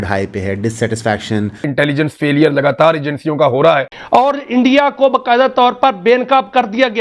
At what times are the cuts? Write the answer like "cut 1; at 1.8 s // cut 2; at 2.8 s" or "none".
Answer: cut 1; at 1.7 s // cut 2; at 3.9 s